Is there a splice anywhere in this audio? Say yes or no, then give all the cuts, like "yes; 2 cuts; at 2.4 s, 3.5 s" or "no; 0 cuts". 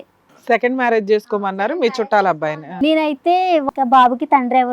yes; 2 cuts; at 2.7 s, 3.6 s